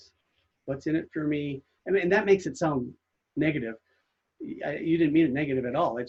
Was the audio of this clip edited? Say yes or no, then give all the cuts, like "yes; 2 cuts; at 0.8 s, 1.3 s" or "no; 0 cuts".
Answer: no; 0 cuts